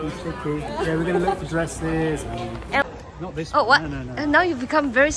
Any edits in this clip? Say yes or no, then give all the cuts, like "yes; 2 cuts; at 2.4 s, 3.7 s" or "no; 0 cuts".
yes; 1 cut; at 2.8 s